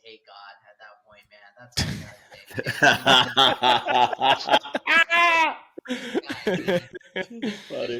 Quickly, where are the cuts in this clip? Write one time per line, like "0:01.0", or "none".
none